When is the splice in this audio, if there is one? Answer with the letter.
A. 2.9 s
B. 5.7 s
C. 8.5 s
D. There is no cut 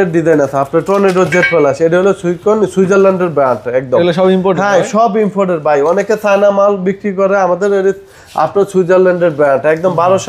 D